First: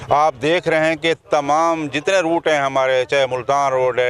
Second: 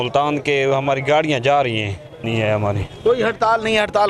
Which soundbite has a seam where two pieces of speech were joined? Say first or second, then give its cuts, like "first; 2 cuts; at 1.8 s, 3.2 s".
second; 1 cut; at 2.3 s